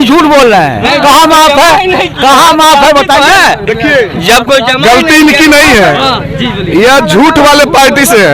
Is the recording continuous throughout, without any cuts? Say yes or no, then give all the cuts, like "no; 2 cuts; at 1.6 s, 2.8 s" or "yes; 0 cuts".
yes; 0 cuts